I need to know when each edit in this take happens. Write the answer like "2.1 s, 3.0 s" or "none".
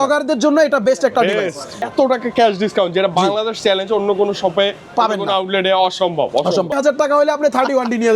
1.8 s, 6.8 s